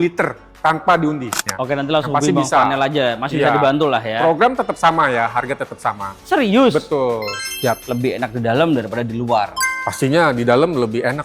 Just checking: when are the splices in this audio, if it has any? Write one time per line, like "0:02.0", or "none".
0:01.4
0:07.3